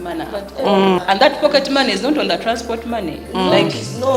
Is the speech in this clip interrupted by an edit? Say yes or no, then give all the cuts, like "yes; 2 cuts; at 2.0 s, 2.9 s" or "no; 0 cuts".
yes; 1 cut; at 1.0 s